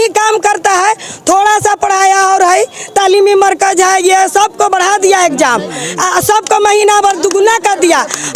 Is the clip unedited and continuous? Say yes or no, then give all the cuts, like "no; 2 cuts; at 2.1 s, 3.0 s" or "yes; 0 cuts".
yes; 0 cuts